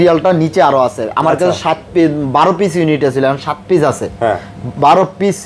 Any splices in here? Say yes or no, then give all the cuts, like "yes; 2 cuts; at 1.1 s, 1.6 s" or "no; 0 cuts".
no; 0 cuts